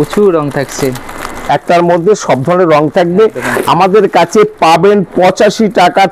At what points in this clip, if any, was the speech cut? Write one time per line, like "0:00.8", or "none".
none